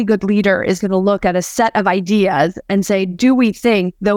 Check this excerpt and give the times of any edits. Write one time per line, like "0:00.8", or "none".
0:01.3